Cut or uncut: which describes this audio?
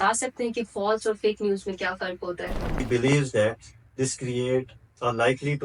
cut